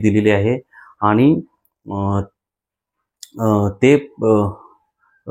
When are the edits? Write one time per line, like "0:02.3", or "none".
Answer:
none